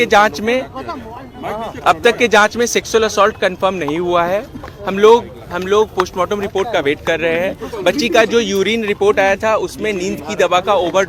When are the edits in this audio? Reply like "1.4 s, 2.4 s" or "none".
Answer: none